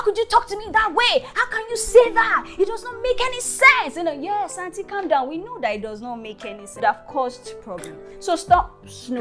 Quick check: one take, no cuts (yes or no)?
no